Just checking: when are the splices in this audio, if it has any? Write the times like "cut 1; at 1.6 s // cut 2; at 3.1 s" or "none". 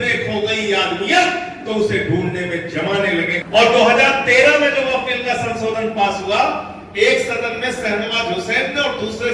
cut 1; at 3.4 s

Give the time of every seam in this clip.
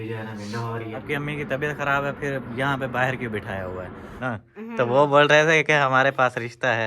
cut 1; at 1.0 s // cut 2; at 4.2 s

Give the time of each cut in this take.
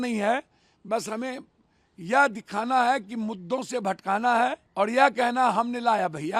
cut 1; at 4.6 s

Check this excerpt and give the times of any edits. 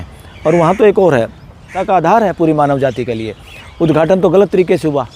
cut 1; at 1.7 s

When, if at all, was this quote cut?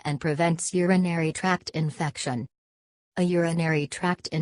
cut 1; at 1.7 s

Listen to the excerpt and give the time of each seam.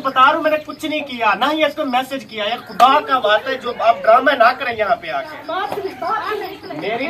cut 1; at 4.9 s

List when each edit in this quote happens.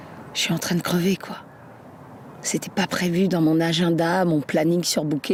none

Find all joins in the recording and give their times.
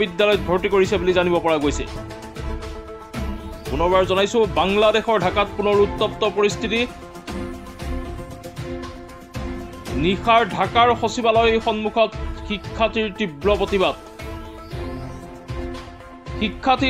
cut 1; at 1.9 s // cut 2; at 3.7 s // cut 3; at 6.9 s // cut 4; at 9.7 s

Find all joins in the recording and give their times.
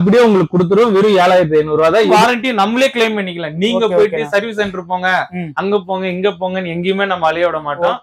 cut 1; at 2.1 s

